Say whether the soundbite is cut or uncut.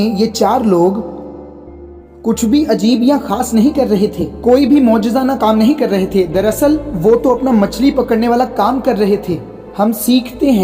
uncut